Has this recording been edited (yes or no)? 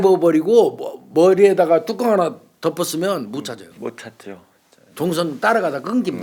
no